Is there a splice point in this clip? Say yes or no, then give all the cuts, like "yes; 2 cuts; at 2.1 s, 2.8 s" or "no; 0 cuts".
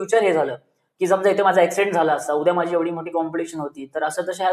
no; 0 cuts